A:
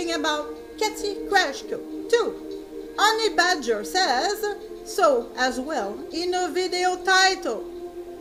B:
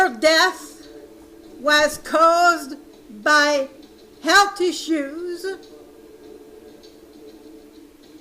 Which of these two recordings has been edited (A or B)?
B